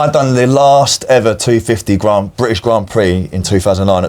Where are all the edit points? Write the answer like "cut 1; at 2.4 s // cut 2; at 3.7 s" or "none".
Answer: none